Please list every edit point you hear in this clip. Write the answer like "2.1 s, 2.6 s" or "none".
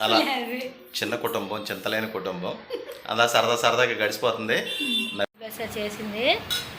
5.3 s

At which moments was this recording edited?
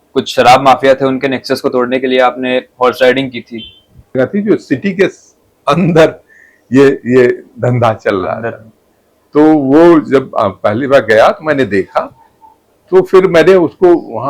4.2 s

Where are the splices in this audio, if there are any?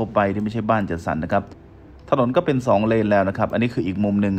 1.6 s

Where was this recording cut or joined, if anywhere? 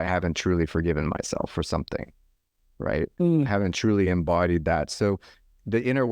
none

